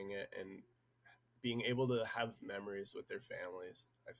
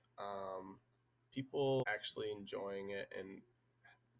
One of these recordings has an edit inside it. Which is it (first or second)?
second